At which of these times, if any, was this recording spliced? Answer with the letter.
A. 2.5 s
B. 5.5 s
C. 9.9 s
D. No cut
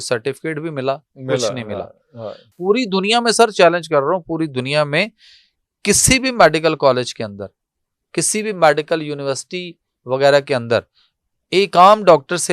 A